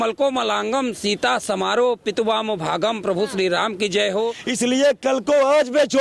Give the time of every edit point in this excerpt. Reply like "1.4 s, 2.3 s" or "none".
4.4 s

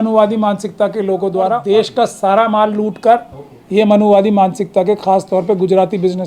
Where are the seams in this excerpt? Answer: 1.6 s

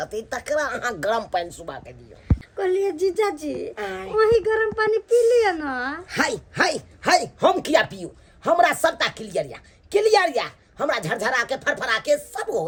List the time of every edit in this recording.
none

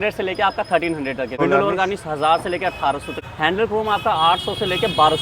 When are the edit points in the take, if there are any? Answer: 1.4 s, 3.1 s

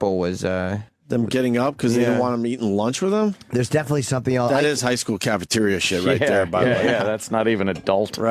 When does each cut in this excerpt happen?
none

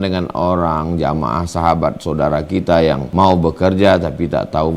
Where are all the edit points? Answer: 3.0 s

